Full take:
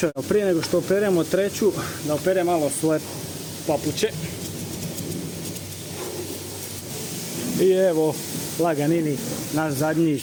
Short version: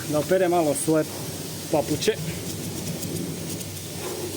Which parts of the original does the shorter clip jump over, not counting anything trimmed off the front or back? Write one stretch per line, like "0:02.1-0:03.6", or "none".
none